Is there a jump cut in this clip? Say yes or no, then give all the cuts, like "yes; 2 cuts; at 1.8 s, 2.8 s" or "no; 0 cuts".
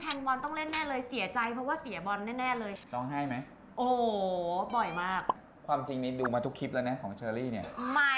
yes; 2 cuts; at 2.8 s, 5.4 s